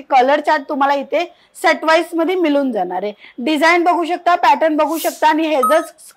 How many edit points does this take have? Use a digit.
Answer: 0